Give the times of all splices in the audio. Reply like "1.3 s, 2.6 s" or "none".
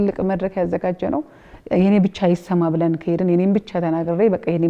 none